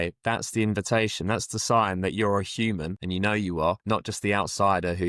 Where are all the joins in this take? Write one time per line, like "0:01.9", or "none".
0:02.9
0:03.8